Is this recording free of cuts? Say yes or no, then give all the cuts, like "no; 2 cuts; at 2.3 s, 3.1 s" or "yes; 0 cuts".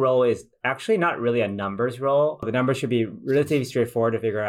no; 1 cut; at 2.5 s